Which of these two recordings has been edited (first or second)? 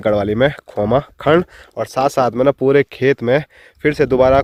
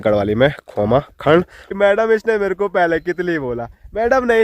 second